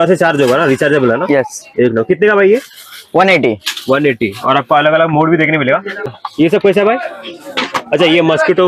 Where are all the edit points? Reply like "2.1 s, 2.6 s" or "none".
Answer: none